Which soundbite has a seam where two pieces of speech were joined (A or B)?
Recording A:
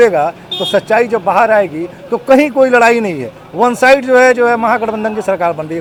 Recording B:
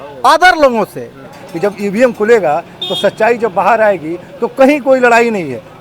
B